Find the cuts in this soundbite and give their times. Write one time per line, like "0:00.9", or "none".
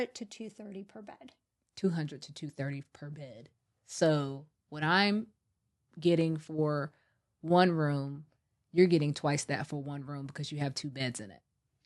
none